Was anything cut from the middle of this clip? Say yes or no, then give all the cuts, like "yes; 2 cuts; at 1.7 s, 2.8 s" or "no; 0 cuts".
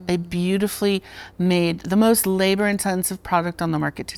no; 0 cuts